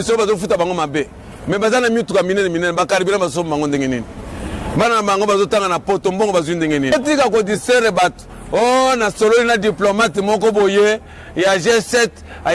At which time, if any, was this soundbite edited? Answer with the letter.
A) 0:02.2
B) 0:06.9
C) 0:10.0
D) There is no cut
B